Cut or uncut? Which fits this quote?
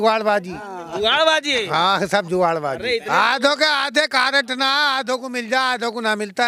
uncut